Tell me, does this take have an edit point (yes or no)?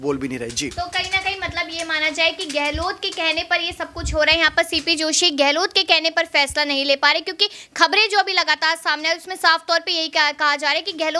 no